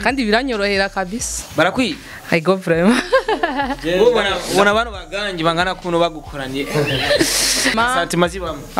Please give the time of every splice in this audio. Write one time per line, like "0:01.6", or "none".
0:07.7